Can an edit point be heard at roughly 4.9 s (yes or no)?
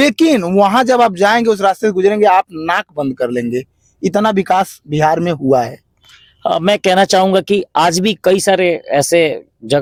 no